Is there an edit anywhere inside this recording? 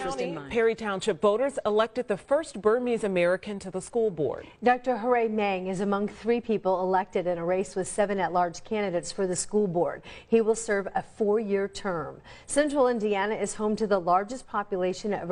no; 0 cuts

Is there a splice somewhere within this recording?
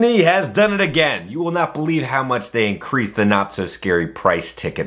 no; 0 cuts

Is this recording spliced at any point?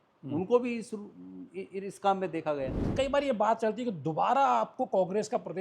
yes; 1 cut; at 2.8 s

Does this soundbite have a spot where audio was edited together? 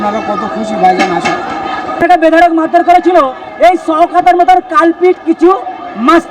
yes; 1 cut; at 1.9 s

